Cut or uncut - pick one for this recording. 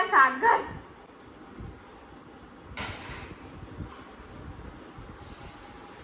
uncut